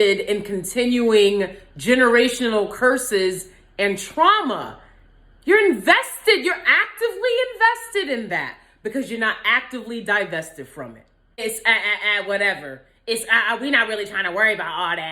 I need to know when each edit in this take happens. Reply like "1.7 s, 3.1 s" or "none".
11.4 s